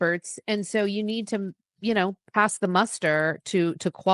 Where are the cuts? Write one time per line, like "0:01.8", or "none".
none